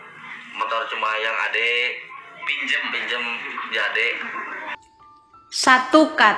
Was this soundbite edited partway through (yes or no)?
yes